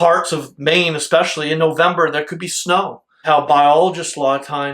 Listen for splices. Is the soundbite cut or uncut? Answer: cut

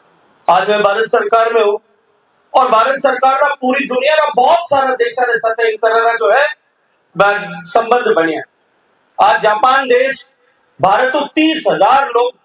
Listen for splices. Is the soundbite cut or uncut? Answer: uncut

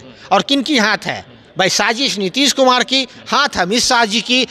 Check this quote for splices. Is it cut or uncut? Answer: uncut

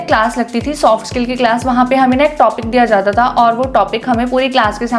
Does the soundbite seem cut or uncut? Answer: uncut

